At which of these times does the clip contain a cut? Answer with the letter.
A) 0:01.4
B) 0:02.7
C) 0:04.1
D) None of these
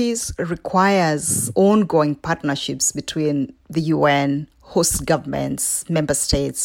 A